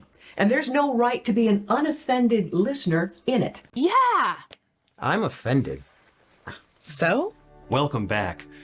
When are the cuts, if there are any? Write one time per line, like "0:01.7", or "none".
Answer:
0:03.6